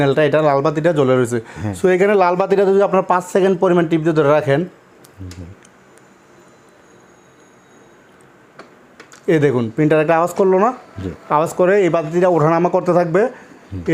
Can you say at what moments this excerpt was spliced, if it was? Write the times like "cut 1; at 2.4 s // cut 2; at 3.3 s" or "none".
none